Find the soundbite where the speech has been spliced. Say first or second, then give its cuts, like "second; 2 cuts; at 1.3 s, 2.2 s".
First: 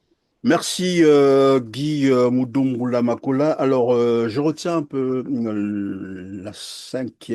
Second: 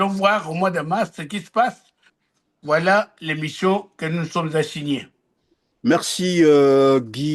second; 1 cut; at 2.1 s